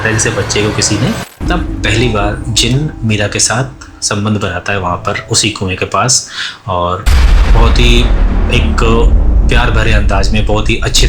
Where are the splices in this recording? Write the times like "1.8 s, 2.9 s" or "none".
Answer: 1.3 s